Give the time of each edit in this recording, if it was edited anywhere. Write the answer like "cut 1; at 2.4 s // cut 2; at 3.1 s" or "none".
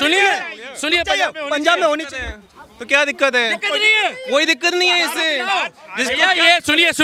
none

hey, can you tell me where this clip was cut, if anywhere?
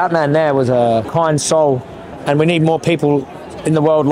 cut 1; at 1.1 s // cut 2; at 2.1 s

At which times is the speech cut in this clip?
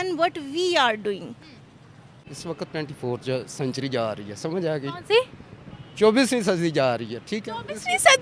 cut 1; at 2.3 s

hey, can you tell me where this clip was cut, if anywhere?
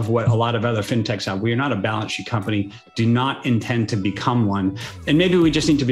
none

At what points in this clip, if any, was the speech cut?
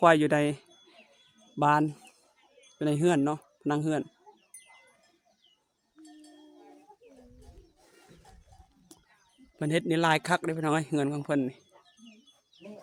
none

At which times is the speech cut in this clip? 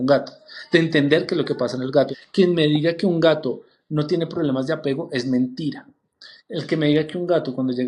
cut 1; at 2.1 s

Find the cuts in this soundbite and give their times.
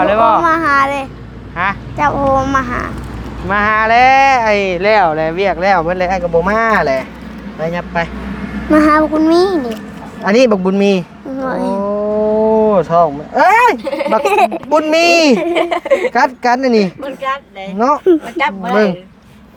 none

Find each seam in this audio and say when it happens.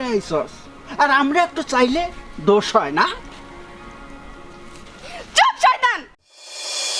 cut 1; at 6.0 s

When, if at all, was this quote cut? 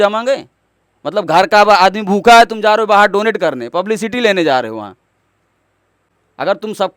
none

